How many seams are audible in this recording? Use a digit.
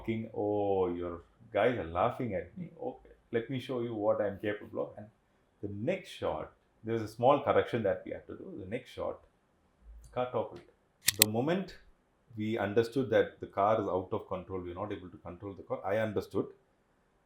1